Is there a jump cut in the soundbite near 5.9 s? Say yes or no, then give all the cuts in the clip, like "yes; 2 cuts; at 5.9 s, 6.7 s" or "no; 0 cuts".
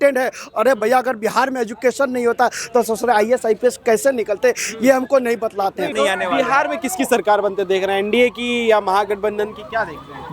yes; 1 cut; at 5.9 s